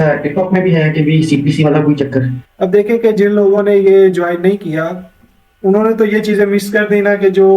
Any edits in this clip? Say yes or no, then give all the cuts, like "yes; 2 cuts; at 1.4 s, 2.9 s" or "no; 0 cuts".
yes; 1 cut; at 2.4 s